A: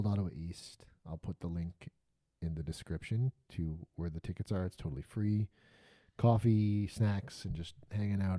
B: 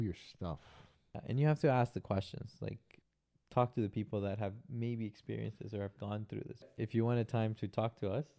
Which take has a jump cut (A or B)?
B